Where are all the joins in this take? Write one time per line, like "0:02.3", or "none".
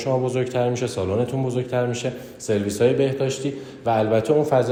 none